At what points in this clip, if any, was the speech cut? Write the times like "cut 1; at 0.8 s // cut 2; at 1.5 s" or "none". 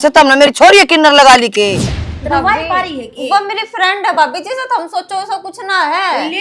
cut 1; at 1.8 s